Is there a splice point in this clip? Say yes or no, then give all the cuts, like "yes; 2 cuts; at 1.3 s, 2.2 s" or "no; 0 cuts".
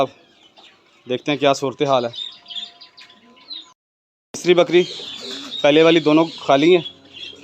yes; 1 cut; at 3.7 s